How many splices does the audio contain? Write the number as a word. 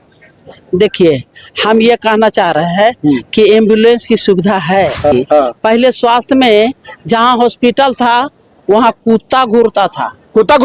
one